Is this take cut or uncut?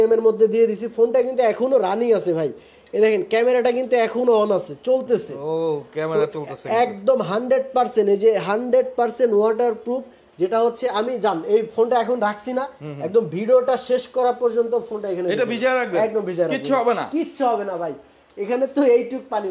uncut